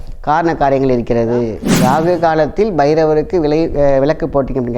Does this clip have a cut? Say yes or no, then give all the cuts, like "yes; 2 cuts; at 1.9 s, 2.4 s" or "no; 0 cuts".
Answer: yes; 1 cut; at 1.6 s